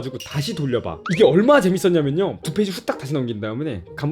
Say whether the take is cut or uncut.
cut